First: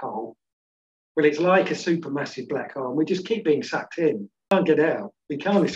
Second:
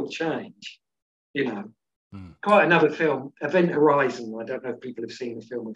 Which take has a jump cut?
first; 1 cut; at 4.5 s

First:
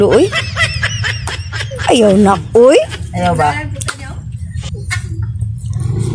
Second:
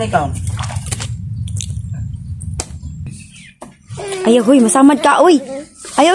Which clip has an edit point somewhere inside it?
second; 1 cut; at 3.0 s

